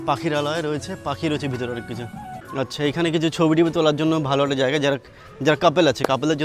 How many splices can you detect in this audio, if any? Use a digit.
1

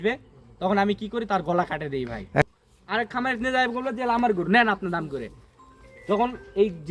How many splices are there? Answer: 1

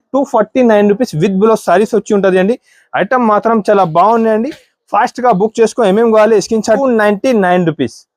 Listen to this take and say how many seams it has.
1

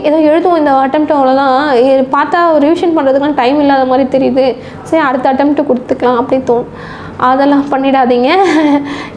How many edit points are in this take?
0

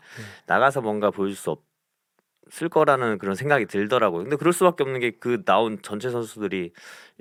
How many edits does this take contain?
0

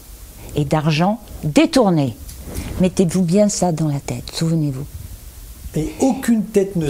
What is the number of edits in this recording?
0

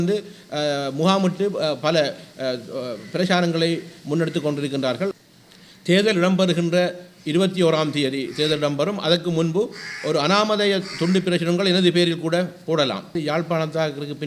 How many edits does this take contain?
2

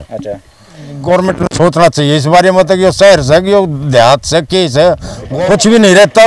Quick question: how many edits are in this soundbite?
2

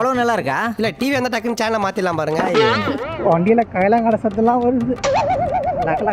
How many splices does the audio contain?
0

